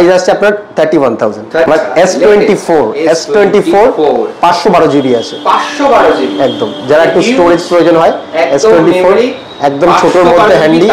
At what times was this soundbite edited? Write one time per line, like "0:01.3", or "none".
0:01.7